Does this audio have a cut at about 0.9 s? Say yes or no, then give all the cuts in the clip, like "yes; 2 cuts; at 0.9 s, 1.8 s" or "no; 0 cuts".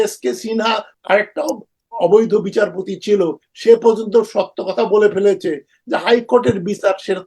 yes; 1 cut; at 0.9 s